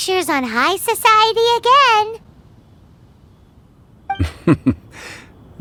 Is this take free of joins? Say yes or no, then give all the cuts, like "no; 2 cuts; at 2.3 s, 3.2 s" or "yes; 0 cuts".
yes; 0 cuts